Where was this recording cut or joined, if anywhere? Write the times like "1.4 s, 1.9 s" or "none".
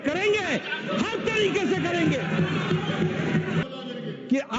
3.6 s